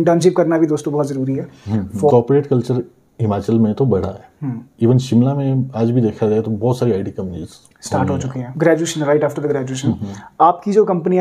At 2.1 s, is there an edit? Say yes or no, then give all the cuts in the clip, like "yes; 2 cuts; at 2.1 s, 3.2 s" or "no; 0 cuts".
yes; 2 cuts; at 2.1 s, 8.7 s